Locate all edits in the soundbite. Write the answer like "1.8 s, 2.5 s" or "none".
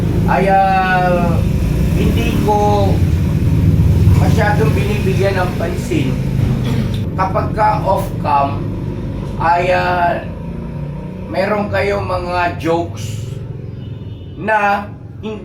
7.0 s